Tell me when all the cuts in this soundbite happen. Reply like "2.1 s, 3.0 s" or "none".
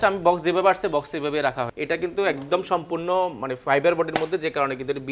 1.7 s